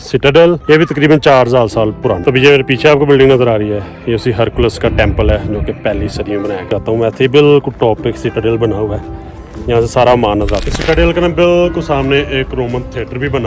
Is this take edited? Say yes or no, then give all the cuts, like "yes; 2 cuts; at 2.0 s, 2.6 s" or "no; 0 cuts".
yes; 3 cuts; at 2.2 s, 6.7 s, 10.6 s